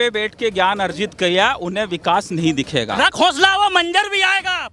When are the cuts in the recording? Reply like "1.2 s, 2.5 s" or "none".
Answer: 3.0 s